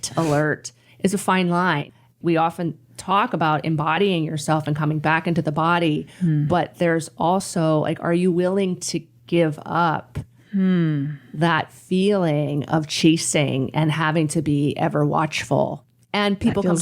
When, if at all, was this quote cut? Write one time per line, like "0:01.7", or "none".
0:01.9